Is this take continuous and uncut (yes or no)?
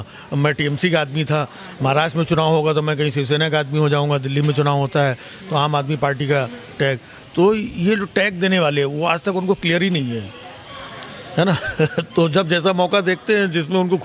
yes